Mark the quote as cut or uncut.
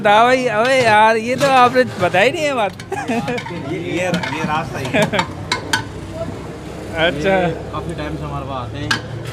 uncut